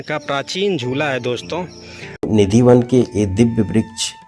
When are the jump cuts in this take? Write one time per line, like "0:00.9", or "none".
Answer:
0:02.3